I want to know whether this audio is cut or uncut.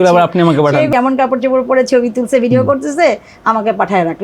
cut